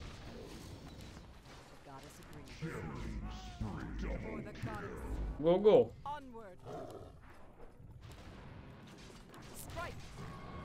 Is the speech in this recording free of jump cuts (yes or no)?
no